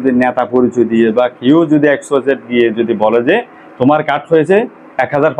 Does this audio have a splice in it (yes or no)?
no